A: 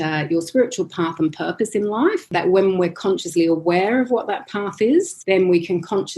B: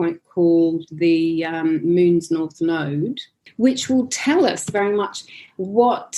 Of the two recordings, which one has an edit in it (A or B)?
A